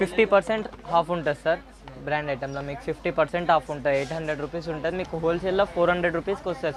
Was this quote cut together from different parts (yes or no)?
no